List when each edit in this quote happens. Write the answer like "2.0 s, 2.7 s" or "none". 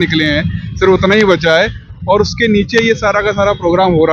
none